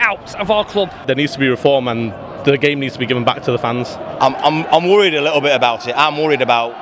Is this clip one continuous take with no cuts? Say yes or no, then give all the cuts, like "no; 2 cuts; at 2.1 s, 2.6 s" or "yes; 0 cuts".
no; 2 cuts; at 1.0 s, 4.1 s